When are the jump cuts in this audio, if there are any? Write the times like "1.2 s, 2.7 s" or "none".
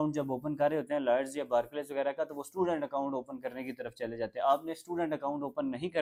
none